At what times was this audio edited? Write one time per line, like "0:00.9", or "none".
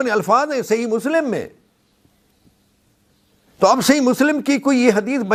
none